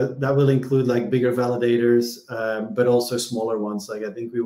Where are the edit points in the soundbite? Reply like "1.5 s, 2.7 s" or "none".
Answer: none